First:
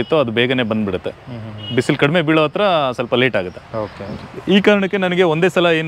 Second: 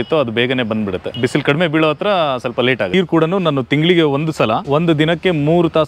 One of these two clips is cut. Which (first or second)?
second